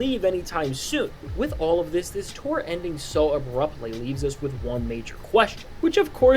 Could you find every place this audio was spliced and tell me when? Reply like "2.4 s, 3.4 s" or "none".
none